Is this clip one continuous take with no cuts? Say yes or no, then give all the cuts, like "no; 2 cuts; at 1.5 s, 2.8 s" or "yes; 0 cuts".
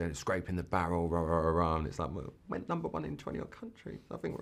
yes; 0 cuts